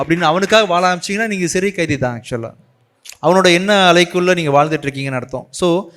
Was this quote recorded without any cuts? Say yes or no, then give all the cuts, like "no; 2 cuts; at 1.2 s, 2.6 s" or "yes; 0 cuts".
yes; 0 cuts